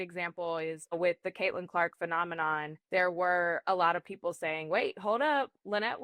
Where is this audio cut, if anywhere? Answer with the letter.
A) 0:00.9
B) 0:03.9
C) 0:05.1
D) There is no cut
A